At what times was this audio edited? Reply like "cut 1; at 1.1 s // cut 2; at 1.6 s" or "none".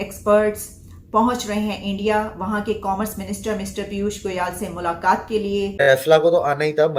cut 1; at 5.7 s

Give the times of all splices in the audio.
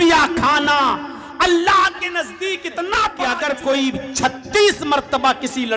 cut 1; at 3.2 s

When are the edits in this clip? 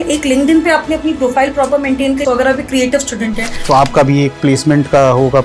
cut 1; at 2.2 s // cut 2; at 3.5 s

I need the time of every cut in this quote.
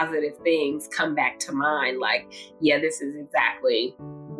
none

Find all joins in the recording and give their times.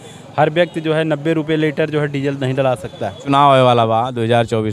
cut 1; at 3.1 s

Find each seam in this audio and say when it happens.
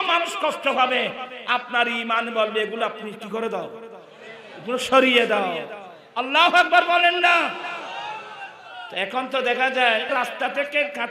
cut 1; at 10.1 s

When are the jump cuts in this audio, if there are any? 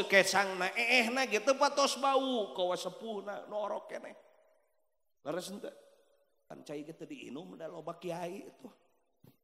cut 1; at 6.5 s

